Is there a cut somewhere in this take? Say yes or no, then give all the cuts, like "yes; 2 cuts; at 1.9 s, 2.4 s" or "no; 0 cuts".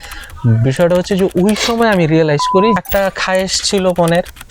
yes; 1 cut; at 2.8 s